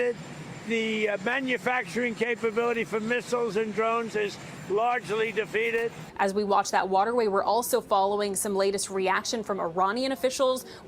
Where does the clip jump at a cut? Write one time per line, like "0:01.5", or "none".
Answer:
0:06.0